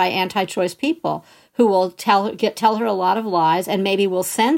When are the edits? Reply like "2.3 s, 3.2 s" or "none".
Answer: none